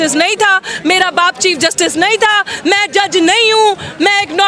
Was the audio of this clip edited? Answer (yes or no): no